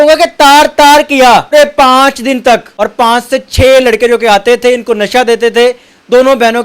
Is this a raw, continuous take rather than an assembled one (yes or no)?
no